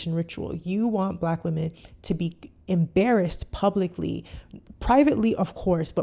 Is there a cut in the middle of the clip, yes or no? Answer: no